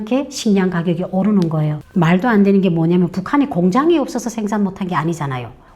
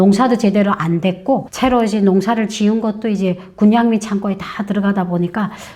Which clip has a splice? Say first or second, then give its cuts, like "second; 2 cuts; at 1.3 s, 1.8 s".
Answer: first; 1 cut; at 1.8 s